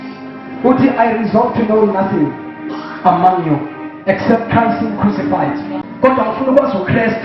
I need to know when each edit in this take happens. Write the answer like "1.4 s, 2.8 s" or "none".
5.8 s